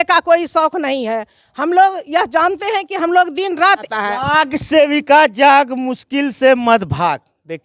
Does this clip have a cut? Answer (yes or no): yes